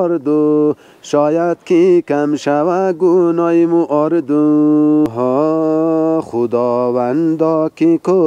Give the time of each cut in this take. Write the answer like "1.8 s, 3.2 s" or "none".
5.1 s